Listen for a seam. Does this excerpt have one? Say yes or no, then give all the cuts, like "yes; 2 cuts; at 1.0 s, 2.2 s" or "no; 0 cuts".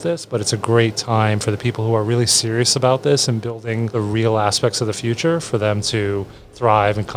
yes; 1 cut; at 3.9 s